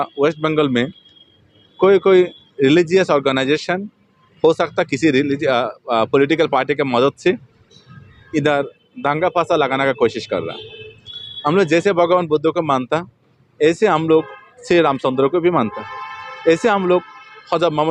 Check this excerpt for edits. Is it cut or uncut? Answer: uncut